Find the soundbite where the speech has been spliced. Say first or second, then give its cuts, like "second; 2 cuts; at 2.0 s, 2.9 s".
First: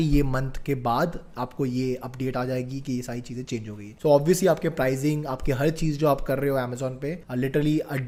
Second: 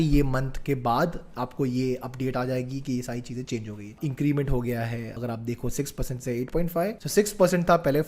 second; 2 cuts; at 3.9 s, 7.0 s